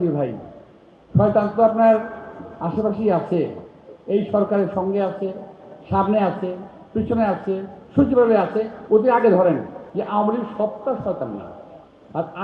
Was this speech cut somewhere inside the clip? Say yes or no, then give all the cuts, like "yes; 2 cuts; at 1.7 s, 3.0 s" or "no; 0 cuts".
yes; 1 cut; at 9.8 s